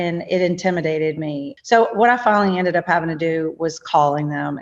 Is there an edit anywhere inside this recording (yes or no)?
yes